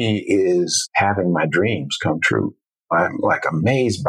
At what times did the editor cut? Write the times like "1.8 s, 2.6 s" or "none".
0.9 s, 2.8 s